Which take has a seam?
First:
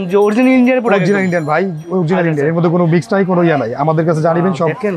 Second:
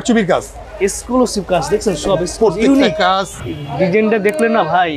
second; 1 cut; at 3.3 s

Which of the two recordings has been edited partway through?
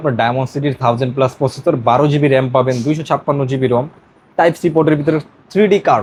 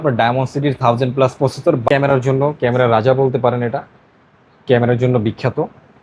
second; 1 cut; at 1.8 s

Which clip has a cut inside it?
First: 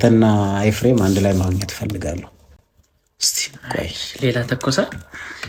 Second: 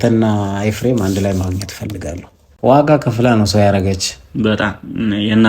second; 1 cut; at 2.5 s

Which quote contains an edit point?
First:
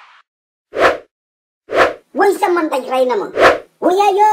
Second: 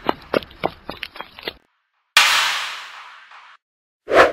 first; 1 cut; at 2.0 s

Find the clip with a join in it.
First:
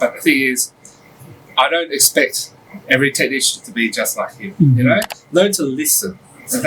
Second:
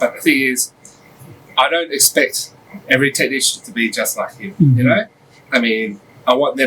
first; 1 cut; at 5.2 s

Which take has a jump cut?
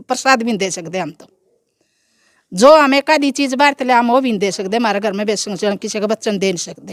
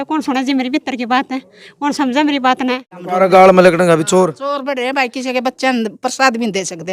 second; 1 cut; at 3.0 s

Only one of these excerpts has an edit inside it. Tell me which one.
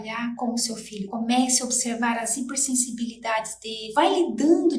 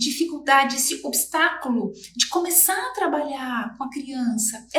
first; 1 cut; at 3.8 s

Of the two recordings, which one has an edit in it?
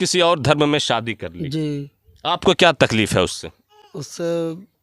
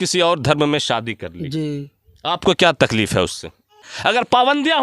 second; 1 cut; at 3.8 s

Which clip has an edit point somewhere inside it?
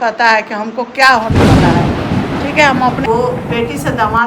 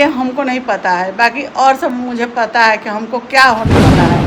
first; 1 cut; at 3.1 s

